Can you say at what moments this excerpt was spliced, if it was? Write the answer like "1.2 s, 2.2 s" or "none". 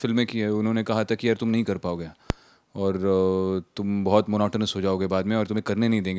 none